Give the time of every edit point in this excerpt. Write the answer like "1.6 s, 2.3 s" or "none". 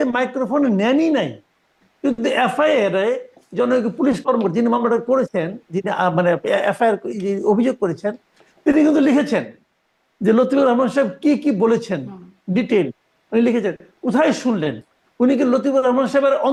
none